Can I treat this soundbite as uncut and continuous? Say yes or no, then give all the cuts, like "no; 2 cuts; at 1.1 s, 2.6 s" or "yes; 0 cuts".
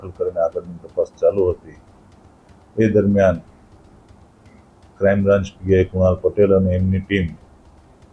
yes; 0 cuts